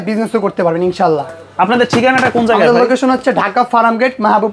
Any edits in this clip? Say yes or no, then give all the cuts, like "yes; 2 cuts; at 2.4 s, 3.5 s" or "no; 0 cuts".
no; 0 cuts